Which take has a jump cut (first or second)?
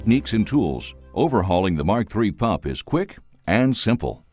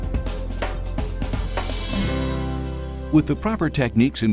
second